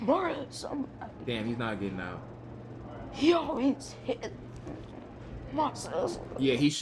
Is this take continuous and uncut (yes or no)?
yes